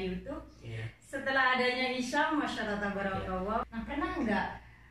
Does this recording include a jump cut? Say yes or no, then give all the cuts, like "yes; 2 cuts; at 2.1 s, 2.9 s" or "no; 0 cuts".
yes; 1 cut; at 3.6 s